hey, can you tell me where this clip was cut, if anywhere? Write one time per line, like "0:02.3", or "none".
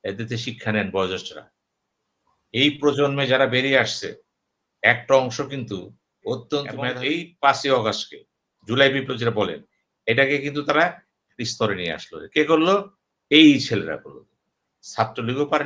0:07.0